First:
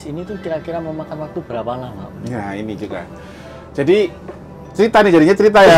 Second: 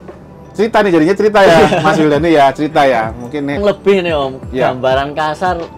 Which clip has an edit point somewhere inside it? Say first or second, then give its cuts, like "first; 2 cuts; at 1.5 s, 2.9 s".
second; 1 cut; at 3.6 s